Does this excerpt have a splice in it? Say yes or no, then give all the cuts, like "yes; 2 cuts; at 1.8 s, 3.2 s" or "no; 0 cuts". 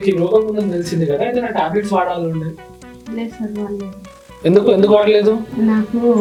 no; 0 cuts